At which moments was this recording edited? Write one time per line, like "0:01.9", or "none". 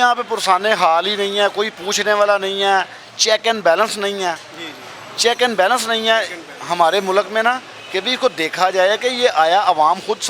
none